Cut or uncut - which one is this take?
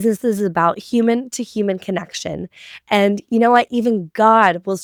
uncut